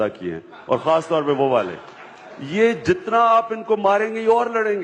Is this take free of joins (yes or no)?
yes